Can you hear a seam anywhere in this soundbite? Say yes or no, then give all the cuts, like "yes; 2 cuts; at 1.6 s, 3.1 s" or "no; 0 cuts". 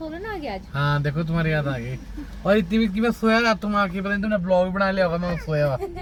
no; 0 cuts